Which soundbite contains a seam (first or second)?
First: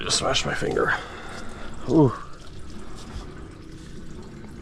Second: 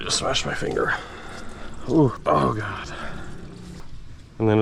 second